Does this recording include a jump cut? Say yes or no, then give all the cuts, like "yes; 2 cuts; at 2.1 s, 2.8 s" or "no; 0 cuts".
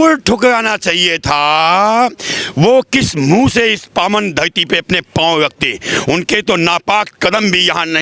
no; 0 cuts